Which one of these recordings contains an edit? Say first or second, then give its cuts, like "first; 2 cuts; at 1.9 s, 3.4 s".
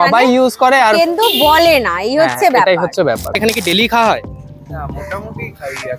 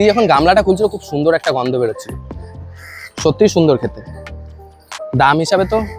first; 1 cut; at 3.4 s